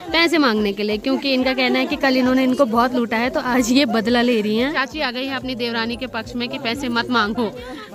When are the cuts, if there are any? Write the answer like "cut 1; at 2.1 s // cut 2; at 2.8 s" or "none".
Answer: none